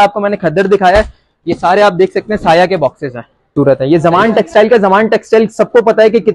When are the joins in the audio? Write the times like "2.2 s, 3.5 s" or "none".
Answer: 3.5 s